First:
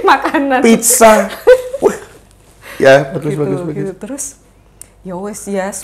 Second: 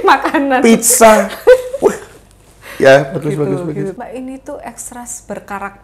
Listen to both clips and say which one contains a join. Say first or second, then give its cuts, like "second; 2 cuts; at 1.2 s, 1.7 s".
second; 1 cut; at 4.0 s